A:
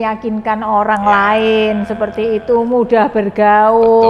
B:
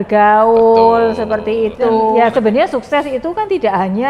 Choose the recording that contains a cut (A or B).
B